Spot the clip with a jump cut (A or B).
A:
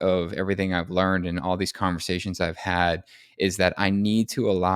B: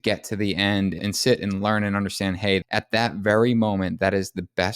B